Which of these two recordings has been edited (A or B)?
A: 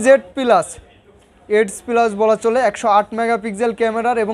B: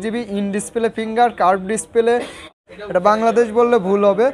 B